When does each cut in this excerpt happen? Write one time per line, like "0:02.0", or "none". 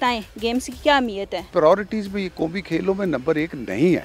0:01.5